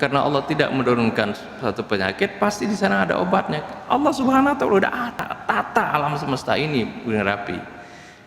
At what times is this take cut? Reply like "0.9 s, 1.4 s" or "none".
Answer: 5.1 s

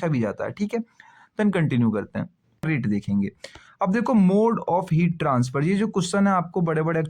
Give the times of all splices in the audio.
2.6 s

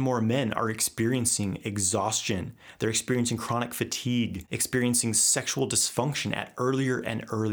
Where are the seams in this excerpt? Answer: 4.5 s

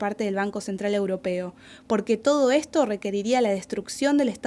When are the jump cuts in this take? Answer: 2.7 s

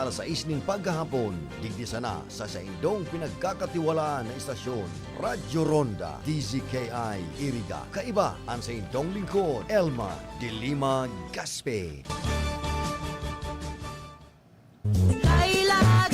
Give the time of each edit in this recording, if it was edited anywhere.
14.9 s

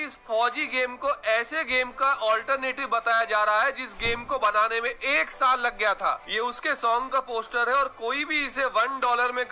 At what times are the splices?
6.2 s

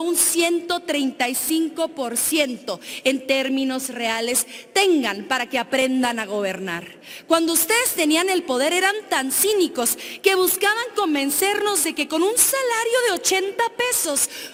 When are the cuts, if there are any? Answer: none

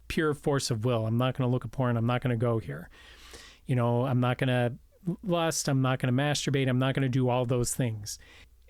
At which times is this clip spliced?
none

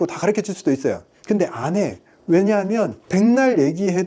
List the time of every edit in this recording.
3.0 s

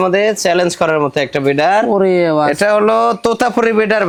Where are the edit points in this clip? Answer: none

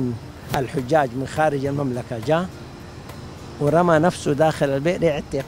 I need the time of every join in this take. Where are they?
none

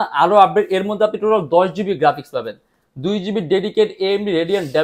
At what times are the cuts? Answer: none

